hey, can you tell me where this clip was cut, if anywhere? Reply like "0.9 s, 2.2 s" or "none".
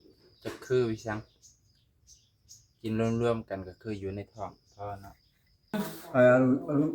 5.7 s